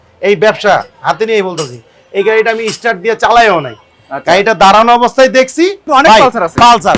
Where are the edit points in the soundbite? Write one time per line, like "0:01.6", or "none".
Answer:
0:05.8